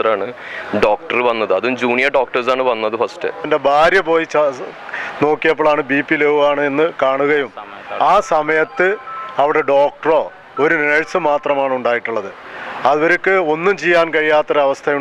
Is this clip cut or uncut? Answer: cut